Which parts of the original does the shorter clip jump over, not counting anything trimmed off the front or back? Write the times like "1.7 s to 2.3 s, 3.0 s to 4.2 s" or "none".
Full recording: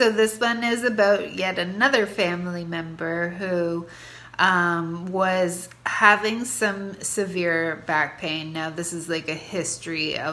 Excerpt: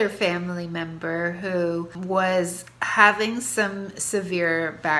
3.9 s to 5.0 s